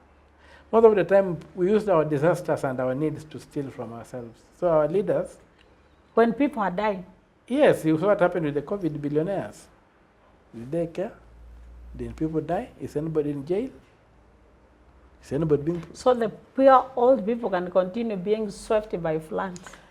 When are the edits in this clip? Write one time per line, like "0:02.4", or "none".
none